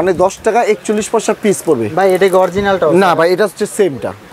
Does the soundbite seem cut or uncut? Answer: uncut